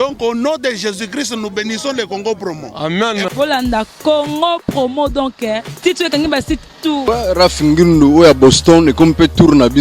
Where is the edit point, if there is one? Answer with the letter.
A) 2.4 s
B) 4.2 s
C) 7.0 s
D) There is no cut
C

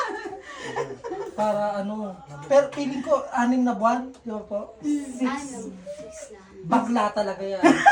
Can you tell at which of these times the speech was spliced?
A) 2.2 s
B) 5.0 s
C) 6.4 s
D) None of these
D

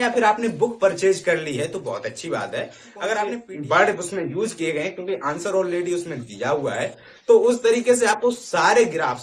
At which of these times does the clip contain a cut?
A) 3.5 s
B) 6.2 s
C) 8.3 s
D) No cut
A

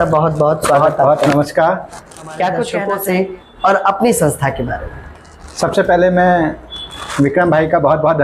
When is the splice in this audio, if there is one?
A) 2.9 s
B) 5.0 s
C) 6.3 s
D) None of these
A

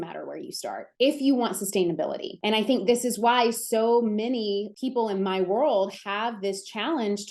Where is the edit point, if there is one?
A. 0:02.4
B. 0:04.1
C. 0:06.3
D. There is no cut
D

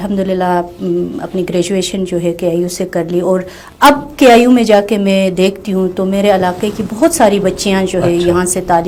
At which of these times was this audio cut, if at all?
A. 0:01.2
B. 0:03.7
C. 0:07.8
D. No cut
D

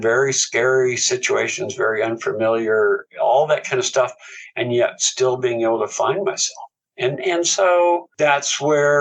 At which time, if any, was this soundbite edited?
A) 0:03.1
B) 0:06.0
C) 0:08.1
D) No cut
D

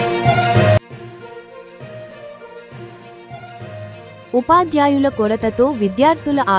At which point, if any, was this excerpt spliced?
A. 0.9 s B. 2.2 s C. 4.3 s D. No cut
D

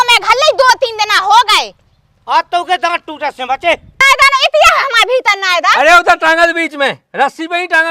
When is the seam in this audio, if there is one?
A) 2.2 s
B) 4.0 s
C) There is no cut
B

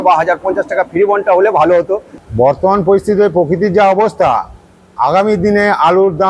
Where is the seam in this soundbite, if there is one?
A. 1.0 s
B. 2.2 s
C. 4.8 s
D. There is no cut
B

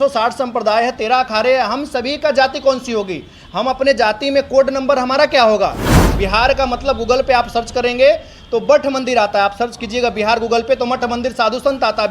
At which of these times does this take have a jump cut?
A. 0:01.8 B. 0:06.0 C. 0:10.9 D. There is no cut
B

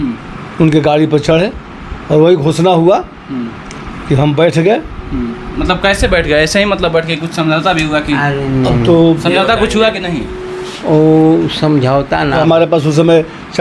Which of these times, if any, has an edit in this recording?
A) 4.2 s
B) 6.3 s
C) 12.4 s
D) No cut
C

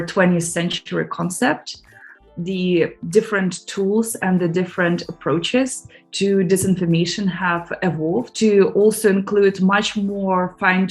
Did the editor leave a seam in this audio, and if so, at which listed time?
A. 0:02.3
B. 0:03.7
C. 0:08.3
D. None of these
A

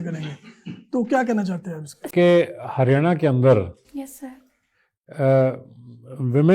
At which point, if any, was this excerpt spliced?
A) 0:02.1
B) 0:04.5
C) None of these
A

